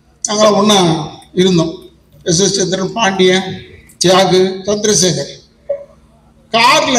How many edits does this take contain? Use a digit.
0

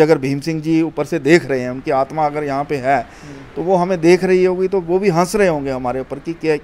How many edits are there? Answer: 0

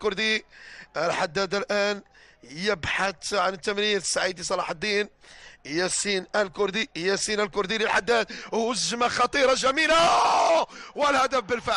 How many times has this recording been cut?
1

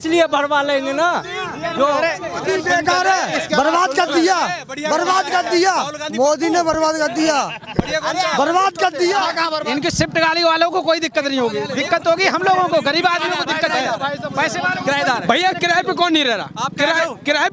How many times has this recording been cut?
2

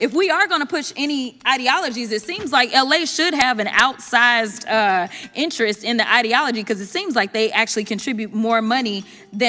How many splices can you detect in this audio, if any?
0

